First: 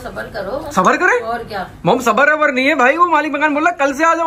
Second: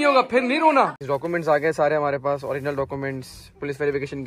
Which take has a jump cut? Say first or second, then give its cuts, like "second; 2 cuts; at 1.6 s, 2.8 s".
second; 1 cut; at 1.0 s